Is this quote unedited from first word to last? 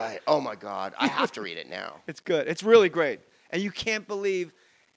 no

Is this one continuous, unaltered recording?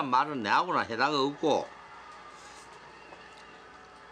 yes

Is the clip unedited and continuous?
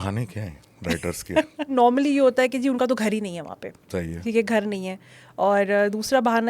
no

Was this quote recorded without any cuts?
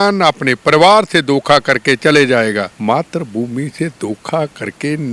no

